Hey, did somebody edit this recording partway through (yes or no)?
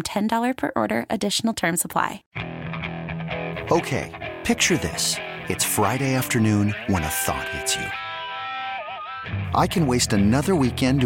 yes